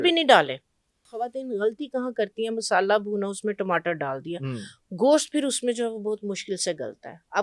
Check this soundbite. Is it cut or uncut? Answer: cut